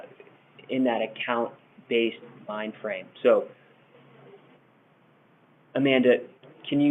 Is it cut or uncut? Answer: uncut